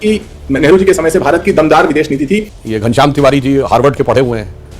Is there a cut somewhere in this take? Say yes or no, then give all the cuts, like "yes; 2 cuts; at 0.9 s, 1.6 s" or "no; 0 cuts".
yes; 1 cut; at 2.5 s